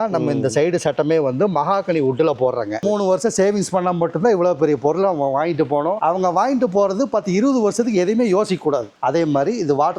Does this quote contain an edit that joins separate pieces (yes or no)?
yes